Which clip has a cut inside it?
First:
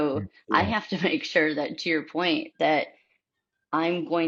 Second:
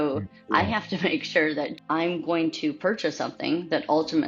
second; 1 cut; at 1.8 s

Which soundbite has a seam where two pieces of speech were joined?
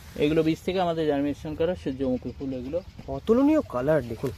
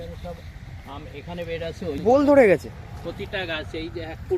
second; 1 cut; at 2.1 s

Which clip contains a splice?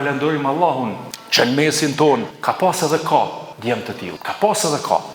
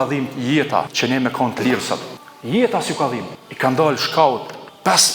second; 1 cut; at 0.9 s

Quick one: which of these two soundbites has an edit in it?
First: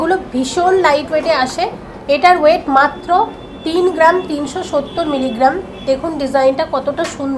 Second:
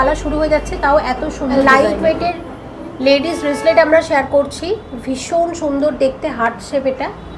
second; 1 cut; at 1.6 s

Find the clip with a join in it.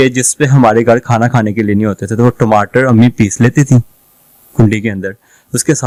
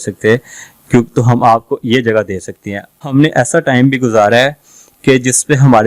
second; 1 cut; at 3.0 s

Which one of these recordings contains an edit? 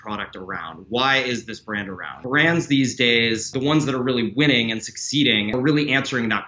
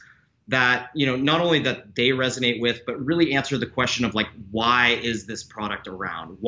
first; 3 cuts; at 2.1 s, 3.5 s, 5.5 s

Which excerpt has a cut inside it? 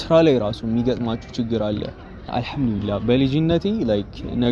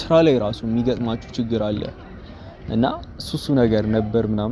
first; 1 cut; at 2.3 s

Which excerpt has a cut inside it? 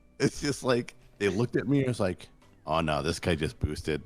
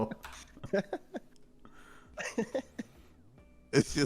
second; 1 cut; at 2.1 s

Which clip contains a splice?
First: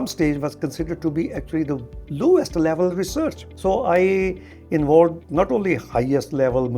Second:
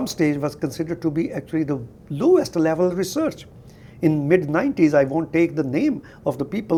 first; 1 cut; at 3.5 s

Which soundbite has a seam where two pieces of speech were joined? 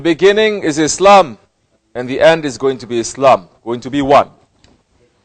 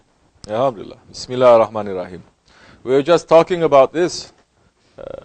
second; 1 cut; at 1.2 s

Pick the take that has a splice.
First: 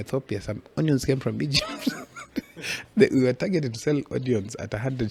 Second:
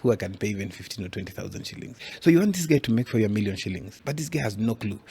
second; 2 cuts; at 2.0 s, 3.9 s

